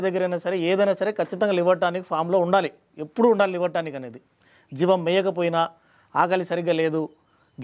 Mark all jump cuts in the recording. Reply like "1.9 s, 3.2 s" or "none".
none